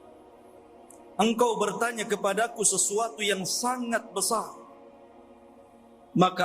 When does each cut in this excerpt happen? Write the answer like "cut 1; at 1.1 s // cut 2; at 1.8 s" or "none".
cut 1; at 1.1 s